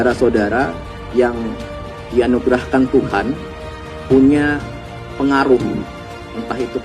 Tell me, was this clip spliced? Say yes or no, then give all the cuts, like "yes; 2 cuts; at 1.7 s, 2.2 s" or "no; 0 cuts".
no; 0 cuts